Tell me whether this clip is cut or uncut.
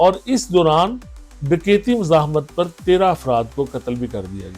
uncut